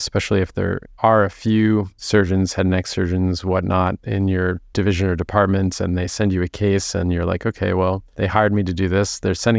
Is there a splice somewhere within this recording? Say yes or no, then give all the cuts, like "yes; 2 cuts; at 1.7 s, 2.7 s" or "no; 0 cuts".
yes; 4 cuts; at 0.9 s, 2.0 s, 4.6 s, 8.1 s